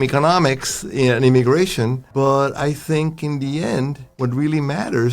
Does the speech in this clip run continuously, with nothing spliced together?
no; 2 cuts; at 2.0 s, 4.0 s

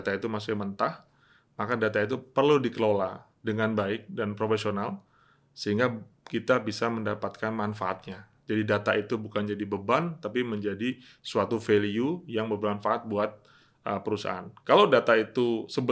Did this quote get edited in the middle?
no; 0 cuts

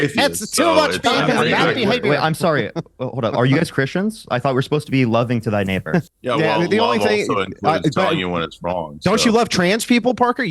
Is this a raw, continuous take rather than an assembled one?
no; 1 cut; at 6.1 s

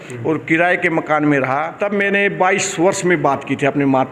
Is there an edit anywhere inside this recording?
yes; 1 cut; at 1.7 s

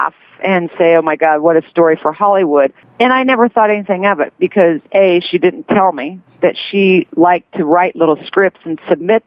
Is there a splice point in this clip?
yes; 1 cut; at 2.8 s

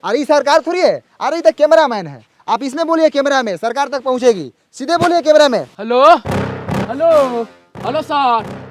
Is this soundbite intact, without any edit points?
yes; 0 cuts

